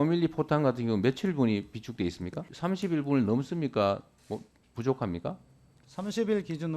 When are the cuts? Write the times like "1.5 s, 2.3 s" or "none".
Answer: 2.5 s